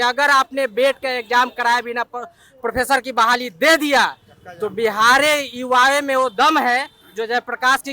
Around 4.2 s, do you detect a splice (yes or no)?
no